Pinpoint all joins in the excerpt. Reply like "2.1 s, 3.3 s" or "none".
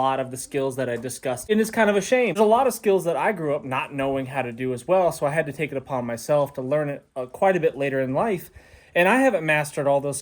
1.4 s, 2.4 s